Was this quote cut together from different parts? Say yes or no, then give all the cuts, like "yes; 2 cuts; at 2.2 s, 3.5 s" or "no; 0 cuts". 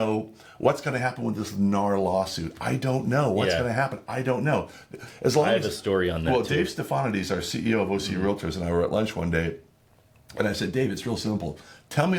no; 0 cuts